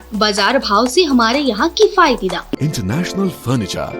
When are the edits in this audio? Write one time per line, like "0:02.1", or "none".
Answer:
0:02.6